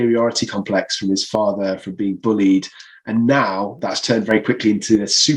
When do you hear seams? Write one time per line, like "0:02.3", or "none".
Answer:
none